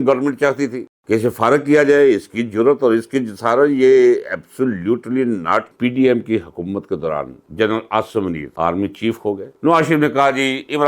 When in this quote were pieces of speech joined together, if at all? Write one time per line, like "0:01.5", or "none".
0:05.7
0:09.5